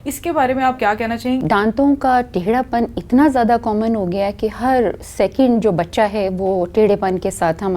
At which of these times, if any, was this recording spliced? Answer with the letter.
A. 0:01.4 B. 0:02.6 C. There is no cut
A